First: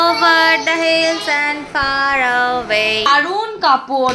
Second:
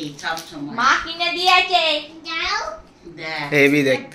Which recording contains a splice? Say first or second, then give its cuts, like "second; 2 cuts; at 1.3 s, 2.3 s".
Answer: first; 1 cut; at 3.1 s